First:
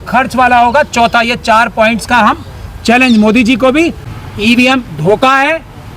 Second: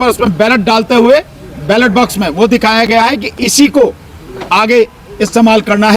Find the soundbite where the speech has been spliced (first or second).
first